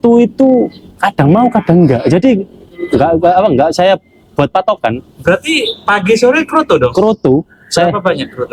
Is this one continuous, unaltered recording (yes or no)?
yes